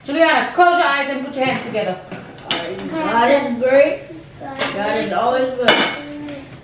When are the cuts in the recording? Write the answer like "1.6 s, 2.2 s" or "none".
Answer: 2.2 s